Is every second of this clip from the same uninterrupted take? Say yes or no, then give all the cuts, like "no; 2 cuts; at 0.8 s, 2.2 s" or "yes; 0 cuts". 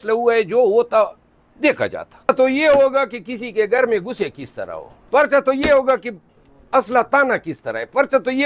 no; 1 cut; at 2.3 s